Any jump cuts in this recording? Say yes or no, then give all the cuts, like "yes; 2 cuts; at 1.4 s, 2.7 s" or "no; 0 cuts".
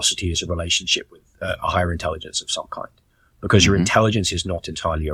no; 0 cuts